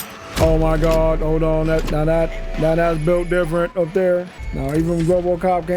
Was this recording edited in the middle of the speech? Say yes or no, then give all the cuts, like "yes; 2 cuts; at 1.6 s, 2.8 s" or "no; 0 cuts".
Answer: yes; 1 cut; at 4.4 s